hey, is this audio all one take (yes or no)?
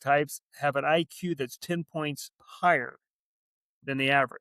yes